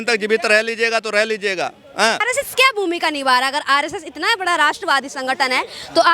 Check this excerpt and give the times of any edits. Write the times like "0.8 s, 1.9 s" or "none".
2.3 s